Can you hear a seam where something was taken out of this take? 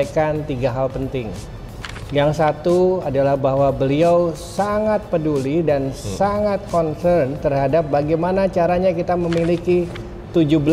no; 0 cuts

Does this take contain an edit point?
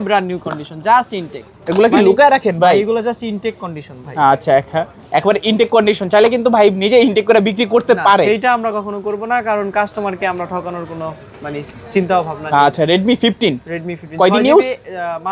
no; 0 cuts

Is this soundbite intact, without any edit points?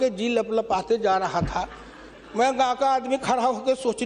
yes; 0 cuts

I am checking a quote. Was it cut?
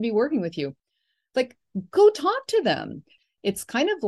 yes; 1 cut; at 3.1 s

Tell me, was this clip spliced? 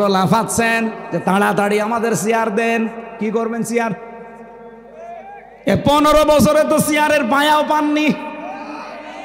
no; 0 cuts

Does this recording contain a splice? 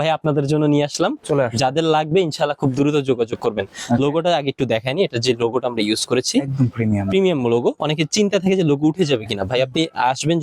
no; 0 cuts

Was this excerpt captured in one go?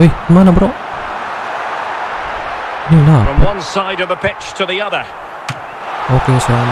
yes; 0 cuts

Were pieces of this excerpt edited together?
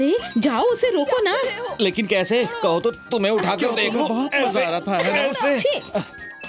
no; 0 cuts

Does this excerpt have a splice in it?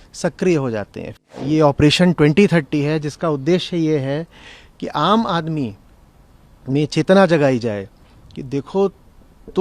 yes; 1 cut; at 1.1 s

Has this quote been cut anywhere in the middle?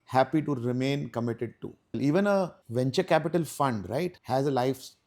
yes; 3 cuts; at 2.0 s, 2.6 s, 4.2 s

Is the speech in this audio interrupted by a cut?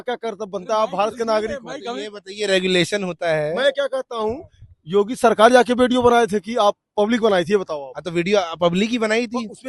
no; 0 cuts

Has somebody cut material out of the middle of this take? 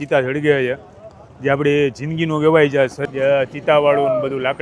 yes; 1 cut; at 3.0 s

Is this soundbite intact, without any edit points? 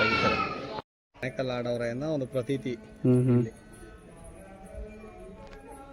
no; 1 cut; at 1.2 s

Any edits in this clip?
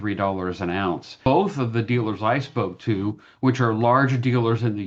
yes; 1 cut; at 1.2 s

